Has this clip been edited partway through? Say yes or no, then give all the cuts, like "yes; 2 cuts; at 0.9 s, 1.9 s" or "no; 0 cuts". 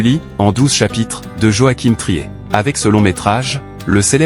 yes; 1 cut; at 2.3 s